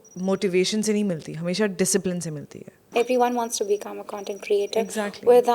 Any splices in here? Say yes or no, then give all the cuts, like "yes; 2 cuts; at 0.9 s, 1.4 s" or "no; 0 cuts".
yes; 1 cut; at 2.8 s